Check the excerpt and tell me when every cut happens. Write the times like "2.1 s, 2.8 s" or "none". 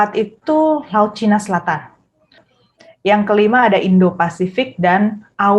2.4 s